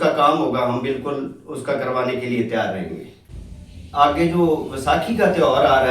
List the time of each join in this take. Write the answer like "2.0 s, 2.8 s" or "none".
3.3 s